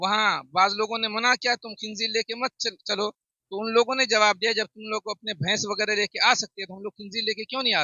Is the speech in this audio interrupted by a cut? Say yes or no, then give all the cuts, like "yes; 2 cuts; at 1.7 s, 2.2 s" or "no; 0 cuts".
no; 0 cuts